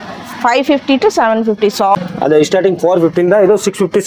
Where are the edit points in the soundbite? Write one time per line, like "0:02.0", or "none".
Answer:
0:01.9

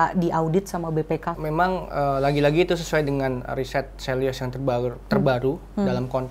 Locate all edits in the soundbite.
0:01.3

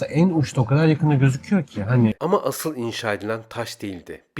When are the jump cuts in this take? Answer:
0:02.2

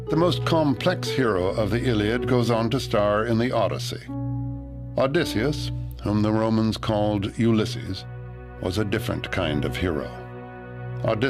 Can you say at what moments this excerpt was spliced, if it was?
0:08.8

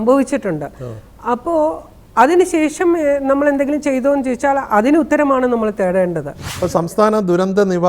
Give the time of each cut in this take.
0:06.5

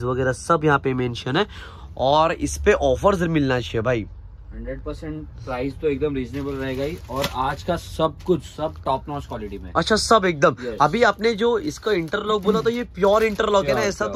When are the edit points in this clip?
none

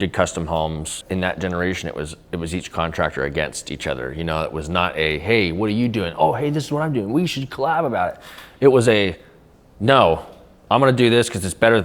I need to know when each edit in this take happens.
0:01.0

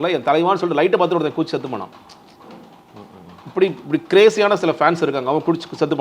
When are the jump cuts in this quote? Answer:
none

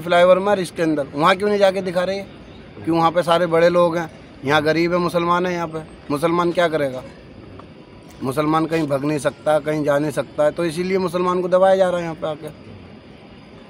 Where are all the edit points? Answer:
none

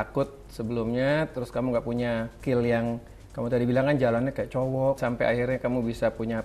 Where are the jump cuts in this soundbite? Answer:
0:02.4
0:05.0

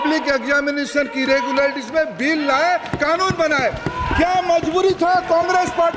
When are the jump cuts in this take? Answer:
none

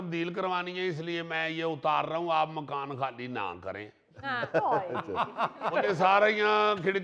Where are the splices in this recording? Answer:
0:05.7

